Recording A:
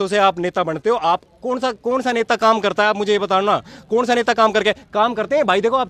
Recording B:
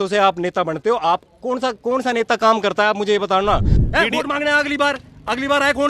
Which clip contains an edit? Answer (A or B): B